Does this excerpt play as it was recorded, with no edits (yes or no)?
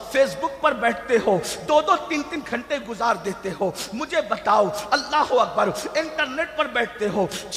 yes